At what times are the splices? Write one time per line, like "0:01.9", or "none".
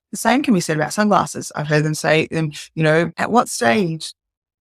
0:03.2